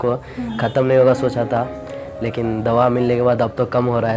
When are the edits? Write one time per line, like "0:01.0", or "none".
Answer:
none

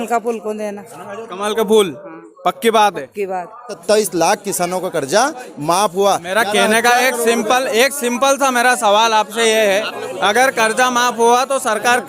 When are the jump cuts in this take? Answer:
0:03.8

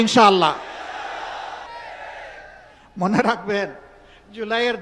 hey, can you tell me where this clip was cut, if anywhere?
0:01.7

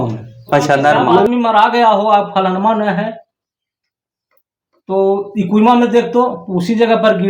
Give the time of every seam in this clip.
0:01.2

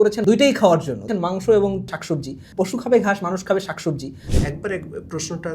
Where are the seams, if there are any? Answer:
0:04.1

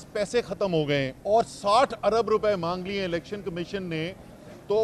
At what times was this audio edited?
0:01.2

